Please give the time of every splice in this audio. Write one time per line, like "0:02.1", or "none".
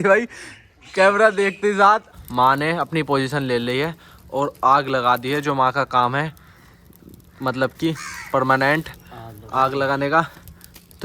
0:02.2